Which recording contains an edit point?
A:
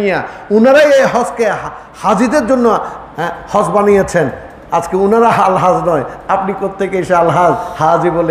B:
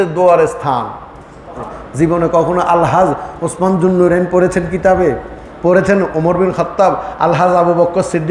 B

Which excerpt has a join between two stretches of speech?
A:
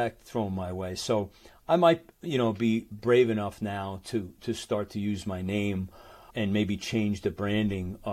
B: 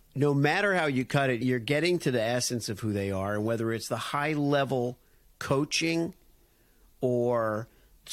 B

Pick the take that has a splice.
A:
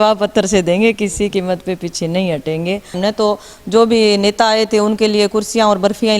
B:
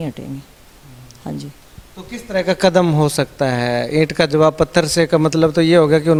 A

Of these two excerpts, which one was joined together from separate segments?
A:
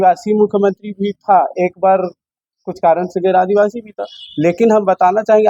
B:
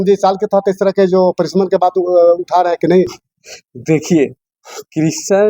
B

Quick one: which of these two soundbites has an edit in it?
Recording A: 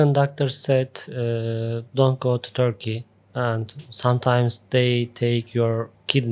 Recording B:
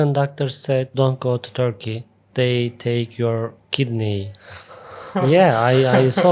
B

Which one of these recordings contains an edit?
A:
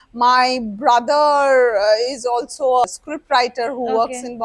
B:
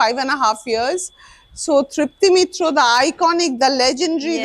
A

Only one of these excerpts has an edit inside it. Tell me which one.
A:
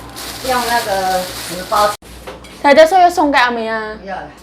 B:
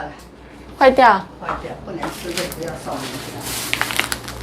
A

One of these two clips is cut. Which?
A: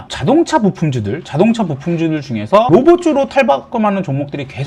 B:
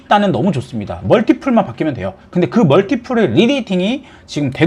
A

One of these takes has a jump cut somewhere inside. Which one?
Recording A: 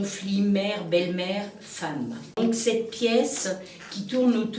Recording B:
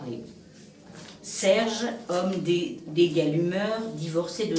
A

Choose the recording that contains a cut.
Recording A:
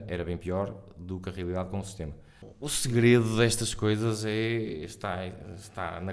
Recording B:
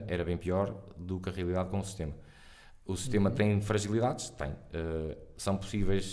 A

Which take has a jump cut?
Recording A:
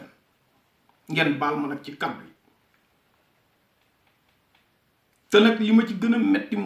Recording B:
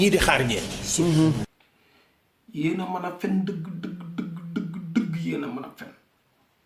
B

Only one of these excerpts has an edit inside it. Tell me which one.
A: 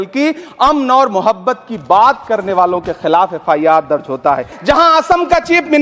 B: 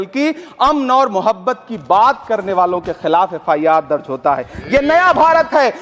A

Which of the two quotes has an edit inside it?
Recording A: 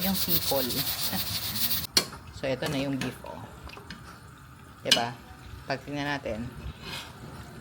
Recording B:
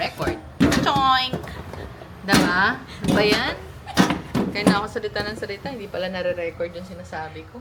A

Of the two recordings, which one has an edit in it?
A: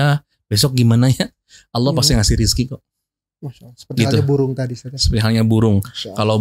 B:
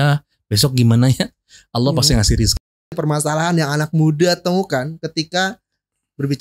B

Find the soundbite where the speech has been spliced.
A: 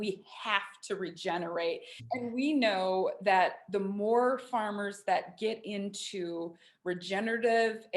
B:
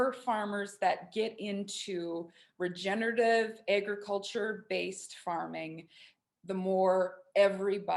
A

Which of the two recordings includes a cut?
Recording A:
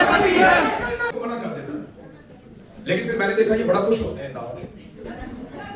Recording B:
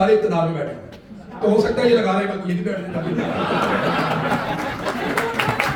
A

